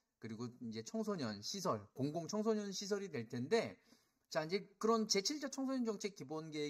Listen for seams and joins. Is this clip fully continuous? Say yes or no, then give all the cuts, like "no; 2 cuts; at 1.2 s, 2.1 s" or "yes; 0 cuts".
yes; 0 cuts